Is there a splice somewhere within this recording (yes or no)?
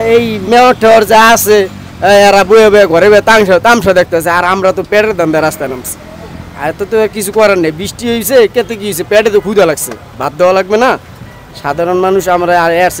no